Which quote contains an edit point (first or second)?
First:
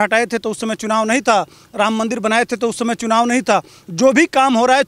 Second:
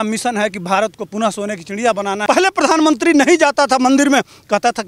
second